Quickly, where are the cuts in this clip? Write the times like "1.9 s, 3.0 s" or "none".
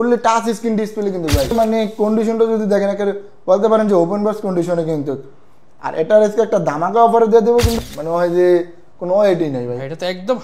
1.5 s, 7.8 s